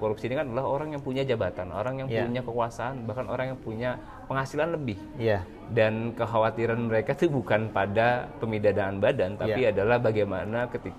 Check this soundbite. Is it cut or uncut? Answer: uncut